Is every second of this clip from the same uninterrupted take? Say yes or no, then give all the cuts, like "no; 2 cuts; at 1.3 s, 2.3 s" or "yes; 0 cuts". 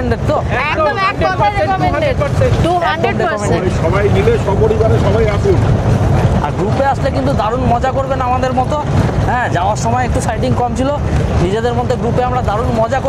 yes; 0 cuts